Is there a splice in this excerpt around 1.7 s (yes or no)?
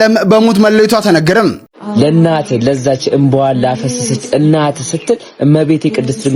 yes